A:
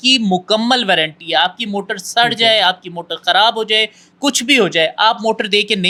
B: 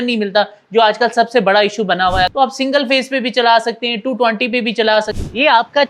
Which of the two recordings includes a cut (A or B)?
B